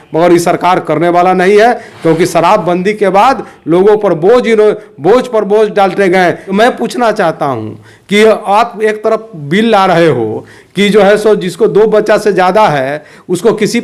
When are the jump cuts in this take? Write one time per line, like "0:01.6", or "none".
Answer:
0:06.5